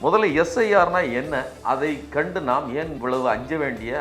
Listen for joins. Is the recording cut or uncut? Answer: cut